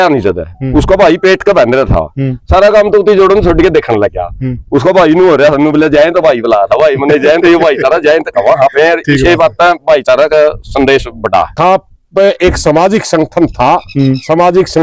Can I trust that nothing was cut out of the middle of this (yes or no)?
no